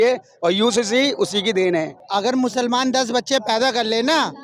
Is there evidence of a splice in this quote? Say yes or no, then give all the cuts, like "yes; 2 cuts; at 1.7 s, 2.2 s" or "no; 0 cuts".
yes; 1 cut; at 2.0 s